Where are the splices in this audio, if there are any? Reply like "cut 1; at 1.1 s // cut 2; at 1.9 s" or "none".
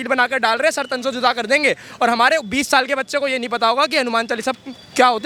none